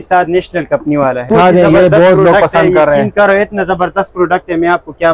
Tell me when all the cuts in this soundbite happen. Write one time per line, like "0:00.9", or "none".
0:01.3